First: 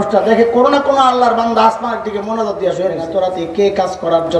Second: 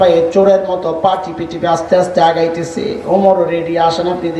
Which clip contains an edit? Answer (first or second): first